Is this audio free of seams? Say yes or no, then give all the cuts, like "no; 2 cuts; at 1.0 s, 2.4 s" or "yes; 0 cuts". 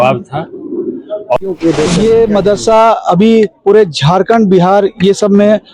no; 1 cut; at 1.4 s